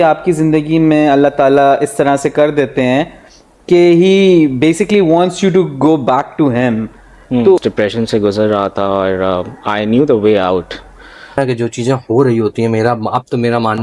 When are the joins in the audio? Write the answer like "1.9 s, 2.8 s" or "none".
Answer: 7.6 s, 11.4 s

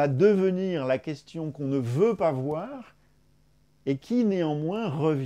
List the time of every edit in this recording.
none

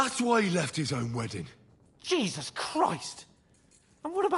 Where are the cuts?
none

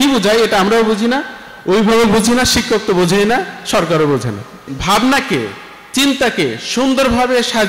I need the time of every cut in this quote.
4.7 s

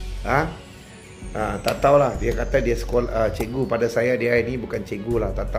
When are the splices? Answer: none

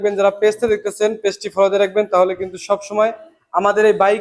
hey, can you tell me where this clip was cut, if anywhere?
none

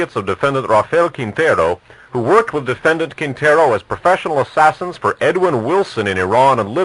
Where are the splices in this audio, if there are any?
4.5 s

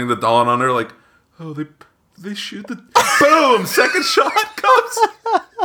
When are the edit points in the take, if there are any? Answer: 4.6 s

